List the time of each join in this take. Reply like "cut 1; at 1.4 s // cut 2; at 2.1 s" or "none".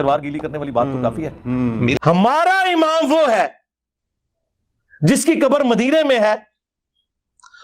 cut 1; at 2.0 s